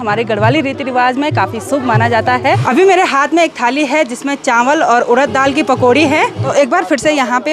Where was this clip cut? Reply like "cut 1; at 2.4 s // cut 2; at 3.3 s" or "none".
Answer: none